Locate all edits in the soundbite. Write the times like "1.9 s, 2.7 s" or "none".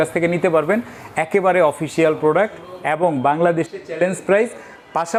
none